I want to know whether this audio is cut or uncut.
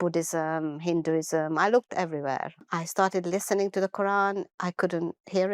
cut